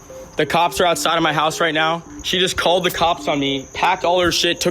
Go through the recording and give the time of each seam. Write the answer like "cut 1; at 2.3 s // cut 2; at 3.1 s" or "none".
cut 1; at 2.1 s